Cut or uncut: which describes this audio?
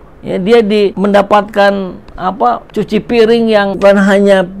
cut